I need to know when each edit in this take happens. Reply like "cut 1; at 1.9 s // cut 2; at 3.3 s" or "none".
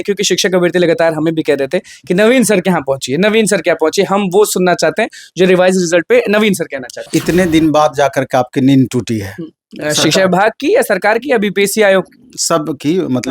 cut 1; at 7.1 s